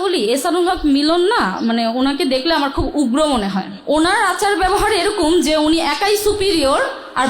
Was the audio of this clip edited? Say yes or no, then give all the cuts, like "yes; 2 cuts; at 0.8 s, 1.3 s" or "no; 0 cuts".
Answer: yes; 1 cut; at 3.7 s